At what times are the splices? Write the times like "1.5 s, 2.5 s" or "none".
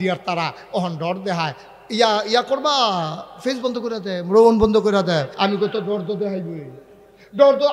5.3 s